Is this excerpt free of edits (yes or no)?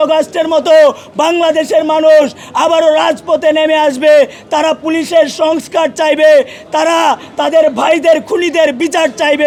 yes